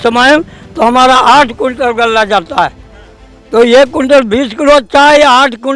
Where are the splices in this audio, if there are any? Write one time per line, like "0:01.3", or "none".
none